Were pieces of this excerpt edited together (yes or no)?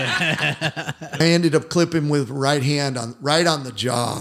yes